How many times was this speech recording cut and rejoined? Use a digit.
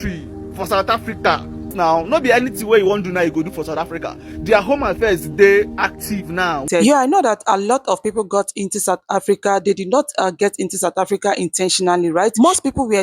2